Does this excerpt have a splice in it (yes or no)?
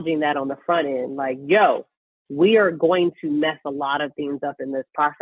no